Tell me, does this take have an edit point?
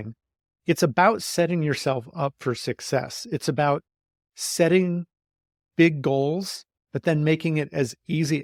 no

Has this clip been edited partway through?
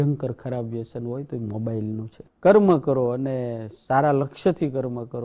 yes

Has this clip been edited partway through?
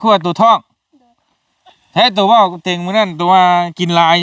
no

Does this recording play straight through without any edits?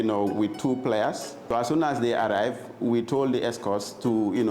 no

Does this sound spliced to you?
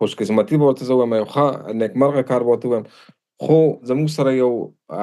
yes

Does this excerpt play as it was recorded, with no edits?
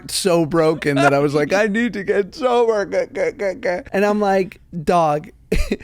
no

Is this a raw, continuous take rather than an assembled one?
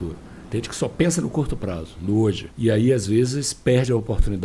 no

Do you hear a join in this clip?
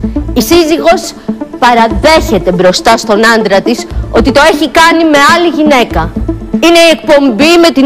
no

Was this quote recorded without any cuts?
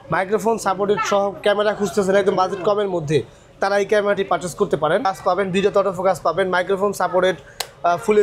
no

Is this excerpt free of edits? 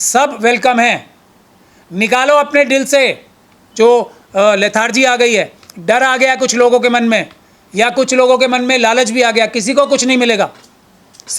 yes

